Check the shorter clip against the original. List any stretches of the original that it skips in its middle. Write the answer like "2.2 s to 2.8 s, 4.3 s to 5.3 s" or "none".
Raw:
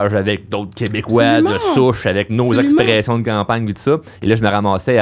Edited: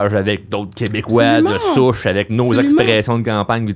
none